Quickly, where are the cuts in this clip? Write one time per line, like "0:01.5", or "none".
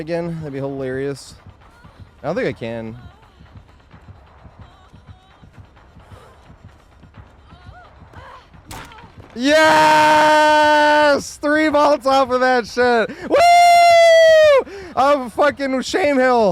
none